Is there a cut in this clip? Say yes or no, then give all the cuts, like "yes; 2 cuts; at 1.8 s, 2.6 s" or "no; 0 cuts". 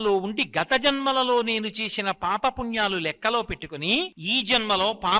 yes; 1 cut; at 4.2 s